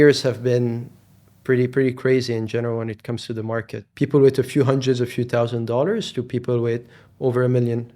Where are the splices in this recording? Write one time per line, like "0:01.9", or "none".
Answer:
0:03.8